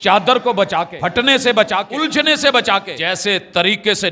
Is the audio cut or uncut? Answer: cut